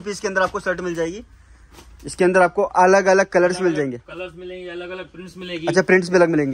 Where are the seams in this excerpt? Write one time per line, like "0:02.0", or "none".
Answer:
none